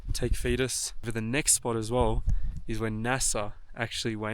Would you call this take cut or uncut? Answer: cut